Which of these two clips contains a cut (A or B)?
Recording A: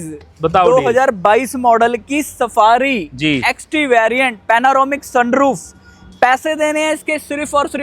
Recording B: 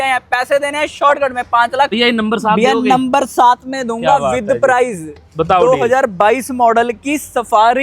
B